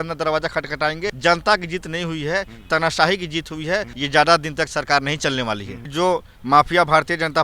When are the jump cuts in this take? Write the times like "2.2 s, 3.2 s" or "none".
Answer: 1.2 s, 3.9 s, 5.8 s